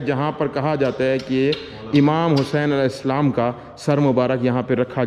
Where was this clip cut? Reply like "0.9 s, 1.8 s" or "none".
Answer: none